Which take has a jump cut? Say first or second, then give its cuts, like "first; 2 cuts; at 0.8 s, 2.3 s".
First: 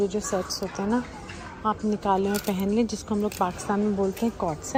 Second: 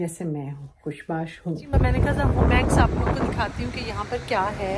second; 1 cut; at 1.7 s